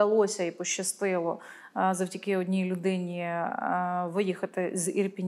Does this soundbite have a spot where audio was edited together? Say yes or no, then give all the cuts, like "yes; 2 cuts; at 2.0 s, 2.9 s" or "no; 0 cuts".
no; 0 cuts